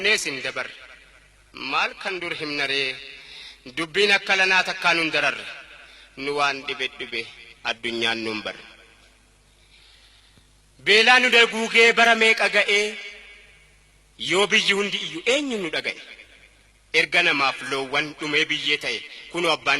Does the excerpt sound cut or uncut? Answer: cut